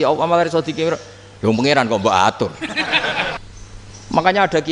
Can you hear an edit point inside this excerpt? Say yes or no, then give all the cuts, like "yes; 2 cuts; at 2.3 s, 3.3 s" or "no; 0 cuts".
yes; 1 cut; at 3.4 s